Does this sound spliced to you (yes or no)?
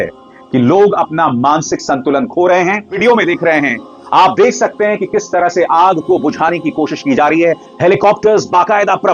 yes